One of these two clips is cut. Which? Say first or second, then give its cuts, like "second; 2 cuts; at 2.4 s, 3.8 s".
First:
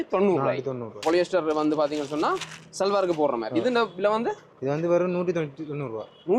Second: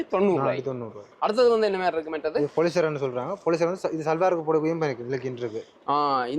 first; 1 cut; at 1.0 s